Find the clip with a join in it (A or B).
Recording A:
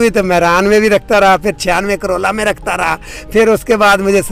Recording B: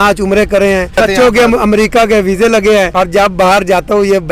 B